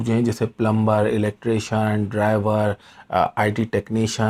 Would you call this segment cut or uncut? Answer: uncut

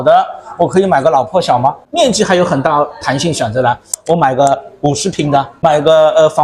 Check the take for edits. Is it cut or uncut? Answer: cut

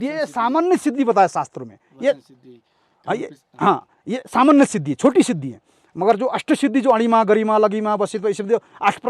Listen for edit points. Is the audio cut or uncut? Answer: uncut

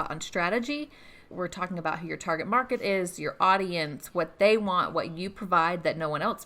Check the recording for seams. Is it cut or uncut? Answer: cut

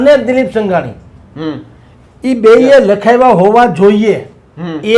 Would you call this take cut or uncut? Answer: uncut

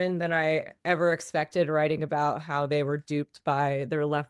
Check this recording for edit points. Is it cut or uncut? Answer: uncut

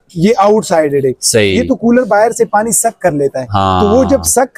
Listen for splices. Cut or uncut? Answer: uncut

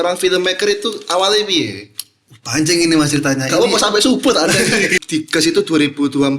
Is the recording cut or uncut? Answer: cut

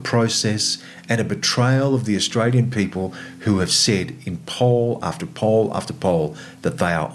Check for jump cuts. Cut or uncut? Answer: uncut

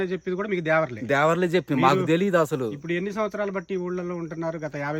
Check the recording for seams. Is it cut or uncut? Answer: uncut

